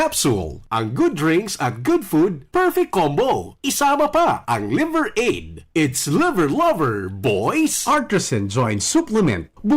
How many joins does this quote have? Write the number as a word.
one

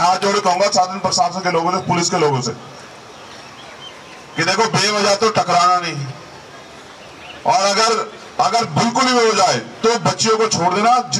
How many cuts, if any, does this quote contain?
zero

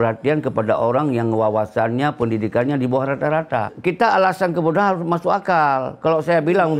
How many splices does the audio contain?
one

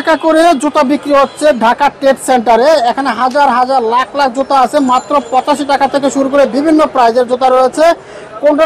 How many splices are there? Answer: zero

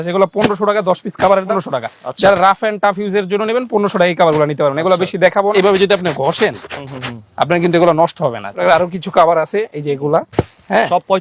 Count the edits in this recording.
three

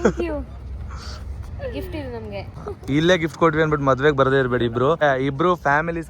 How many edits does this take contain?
two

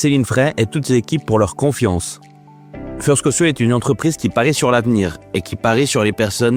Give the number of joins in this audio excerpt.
zero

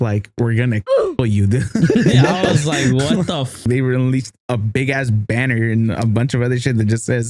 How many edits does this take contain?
one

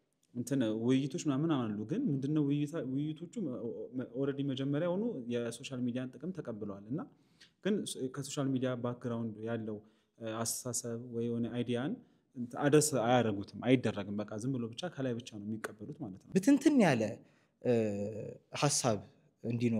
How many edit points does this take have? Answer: one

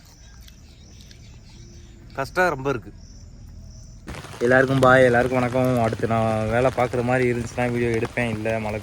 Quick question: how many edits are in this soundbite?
one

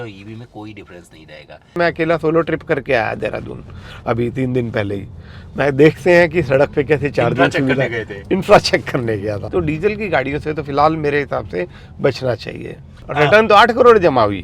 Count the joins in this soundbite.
three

